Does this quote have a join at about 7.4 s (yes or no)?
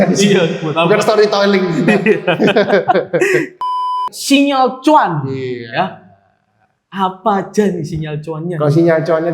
no